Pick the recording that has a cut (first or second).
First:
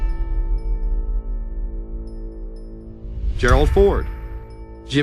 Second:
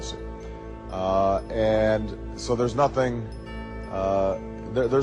first